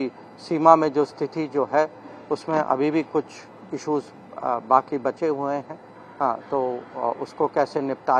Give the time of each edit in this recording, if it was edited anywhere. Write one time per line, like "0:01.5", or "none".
none